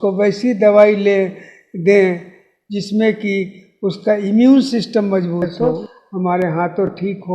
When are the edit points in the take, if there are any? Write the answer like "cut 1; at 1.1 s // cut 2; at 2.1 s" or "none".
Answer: cut 1; at 5.5 s